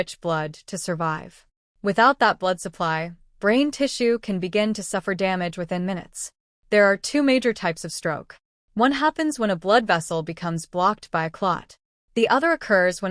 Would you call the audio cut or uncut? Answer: uncut